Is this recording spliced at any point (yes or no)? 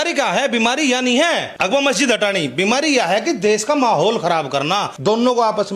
yes